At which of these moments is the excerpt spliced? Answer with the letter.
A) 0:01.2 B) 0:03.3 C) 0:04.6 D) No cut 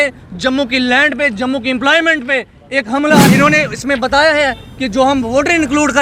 B